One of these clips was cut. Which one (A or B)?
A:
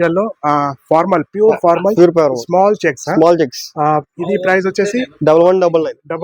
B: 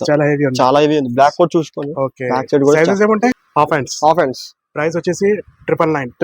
B